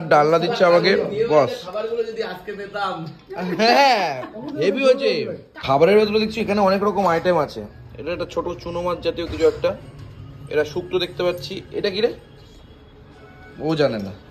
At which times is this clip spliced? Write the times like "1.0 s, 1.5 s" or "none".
5.5 s

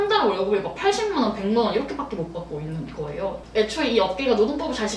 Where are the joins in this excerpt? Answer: 3.4 s

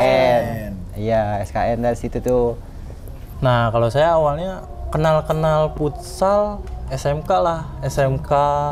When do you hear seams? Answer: 3.2 s

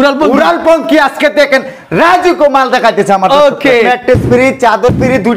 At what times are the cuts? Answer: 3.9 s

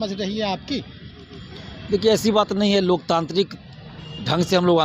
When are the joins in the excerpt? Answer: none

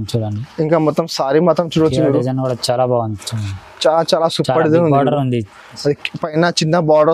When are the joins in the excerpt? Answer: none

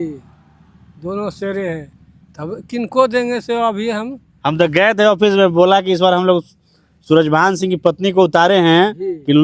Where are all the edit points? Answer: none

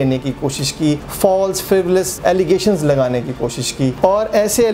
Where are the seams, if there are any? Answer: 1.1 s, 2.1 s, 4.0 s

